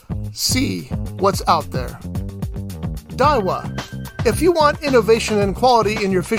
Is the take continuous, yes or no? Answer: yes